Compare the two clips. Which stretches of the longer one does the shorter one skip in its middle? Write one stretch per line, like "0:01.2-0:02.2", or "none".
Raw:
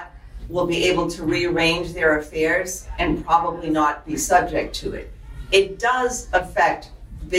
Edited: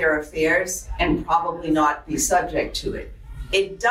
none